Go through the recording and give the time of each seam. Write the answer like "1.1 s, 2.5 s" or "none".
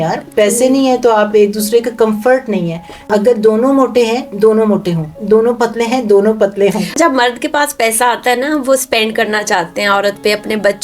3.1 s, 7.0 s